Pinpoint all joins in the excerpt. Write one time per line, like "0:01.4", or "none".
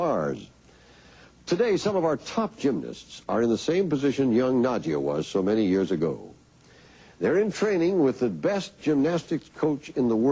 none